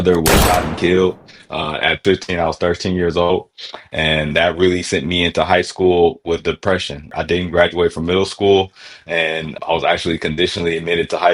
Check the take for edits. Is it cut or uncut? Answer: cut